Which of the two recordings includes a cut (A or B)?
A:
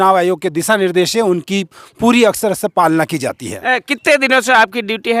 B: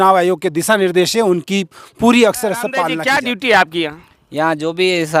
B